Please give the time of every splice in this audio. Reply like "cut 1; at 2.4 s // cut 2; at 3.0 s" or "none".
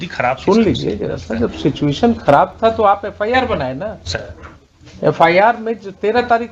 none